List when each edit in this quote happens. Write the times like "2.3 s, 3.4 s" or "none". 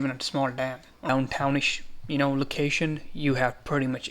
1.1 s